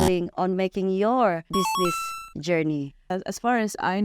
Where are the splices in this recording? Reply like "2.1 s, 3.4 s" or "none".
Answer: 1.4 s, 3.1 s